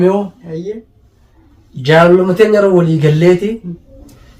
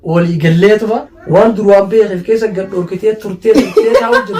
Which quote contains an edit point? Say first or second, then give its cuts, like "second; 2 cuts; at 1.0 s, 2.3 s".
second; 1 cut; at 1.1 s